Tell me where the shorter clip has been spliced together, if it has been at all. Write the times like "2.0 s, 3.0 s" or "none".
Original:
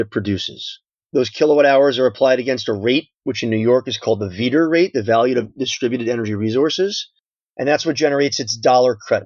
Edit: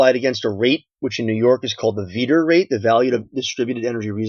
none